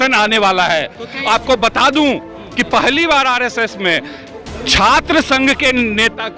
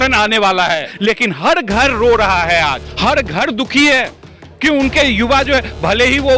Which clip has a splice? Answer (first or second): second